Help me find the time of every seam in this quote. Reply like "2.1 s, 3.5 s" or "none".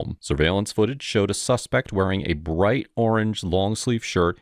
2.4 s

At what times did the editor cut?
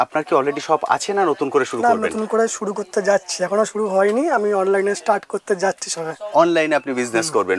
none

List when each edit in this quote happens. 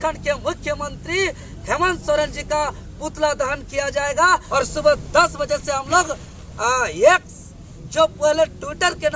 4.5 s

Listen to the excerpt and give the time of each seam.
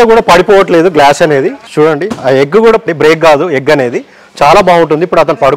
1.6 s, 2.8 s

